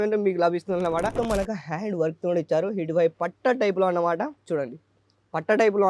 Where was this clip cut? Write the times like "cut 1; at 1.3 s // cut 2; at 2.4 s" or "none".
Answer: cut 1; at 1.1 s